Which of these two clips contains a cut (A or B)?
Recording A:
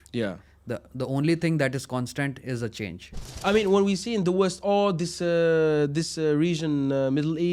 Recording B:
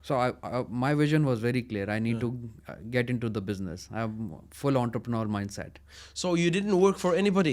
A